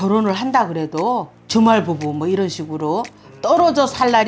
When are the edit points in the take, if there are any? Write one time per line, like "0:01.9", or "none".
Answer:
0:01.4

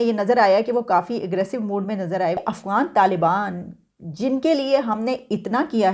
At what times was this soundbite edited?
0:02.4

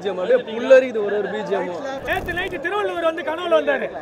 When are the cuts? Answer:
0:02.0

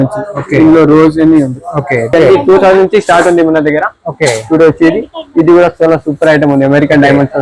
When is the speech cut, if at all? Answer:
0:02.1

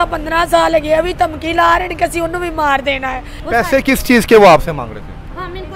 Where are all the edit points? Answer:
0:03.3

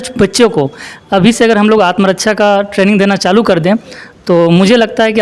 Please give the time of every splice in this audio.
none

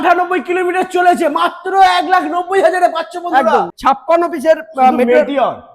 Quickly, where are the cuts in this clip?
0:03.7

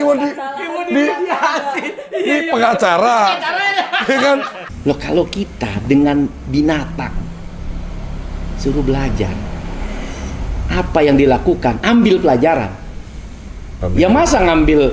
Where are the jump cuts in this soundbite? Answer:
0:04.6

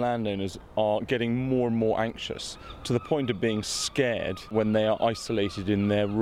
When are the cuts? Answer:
0:02.8
0:04.5

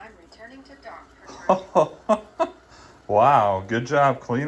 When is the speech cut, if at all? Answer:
none

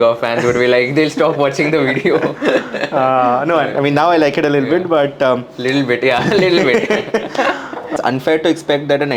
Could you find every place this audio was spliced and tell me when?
0:07.9

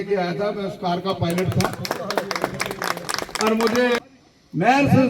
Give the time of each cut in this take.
0:04.0

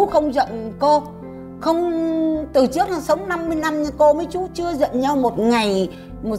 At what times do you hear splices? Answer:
none

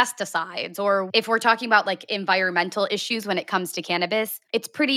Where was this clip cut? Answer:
0:01.1

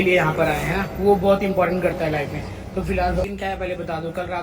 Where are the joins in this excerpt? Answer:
0:03.2

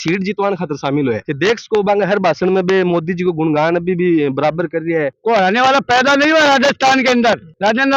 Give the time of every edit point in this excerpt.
0:05.1

